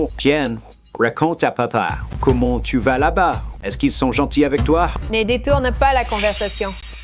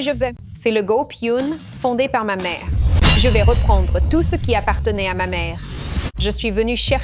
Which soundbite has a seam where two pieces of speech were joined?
second; 1 cut; at 6.0 s

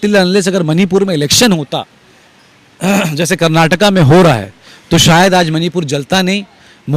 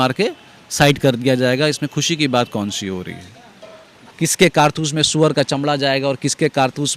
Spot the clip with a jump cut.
second; 1 cut; at 4.1 s

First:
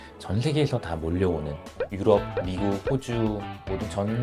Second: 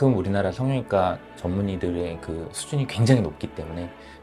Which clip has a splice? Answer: first; 1 cut; at 1.8 s

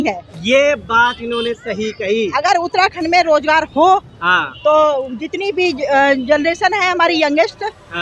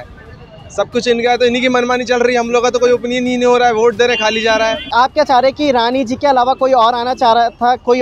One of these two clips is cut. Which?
second; 1 cut; at 4.8 s

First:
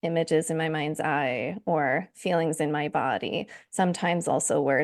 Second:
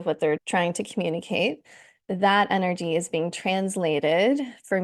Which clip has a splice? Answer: second; 1 cut; at 1.9 s

